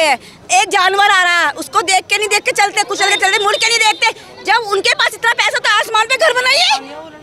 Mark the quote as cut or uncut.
uncut